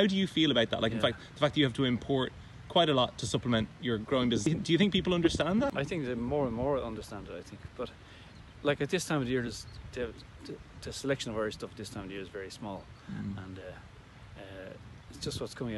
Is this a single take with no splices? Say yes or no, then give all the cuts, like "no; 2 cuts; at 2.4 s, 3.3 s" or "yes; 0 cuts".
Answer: no; 2 cuts; at 4.5 s, 5.7 s